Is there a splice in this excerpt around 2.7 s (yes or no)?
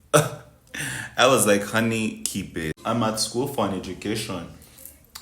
yes